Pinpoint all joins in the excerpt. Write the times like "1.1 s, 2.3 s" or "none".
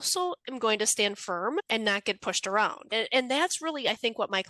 1.7 s, 2.9 s

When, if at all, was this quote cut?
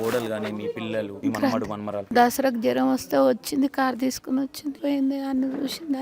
1.1 s, 2.1 s, 4.7 s

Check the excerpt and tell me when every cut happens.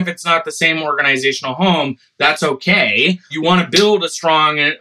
3.3 s

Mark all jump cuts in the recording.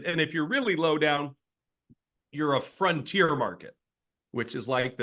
none

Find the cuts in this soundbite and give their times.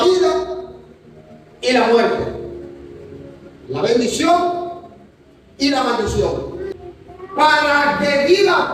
6.7 s

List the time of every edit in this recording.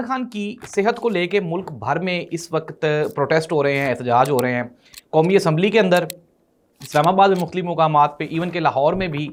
none

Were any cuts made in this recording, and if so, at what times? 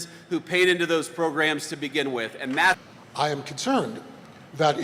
2.8 s

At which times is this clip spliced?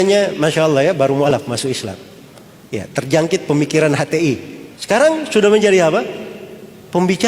1.3 s

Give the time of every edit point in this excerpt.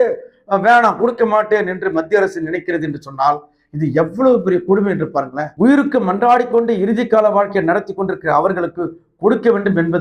5.5 s

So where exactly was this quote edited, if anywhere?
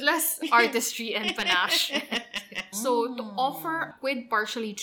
2.6 s, 3.9 s

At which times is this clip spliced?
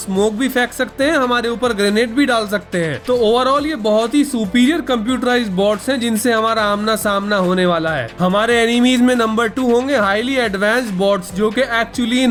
none

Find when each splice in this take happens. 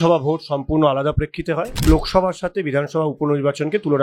1.8 s

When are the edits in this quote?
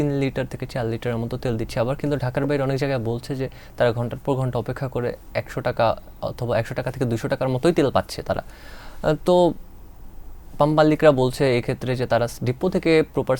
none

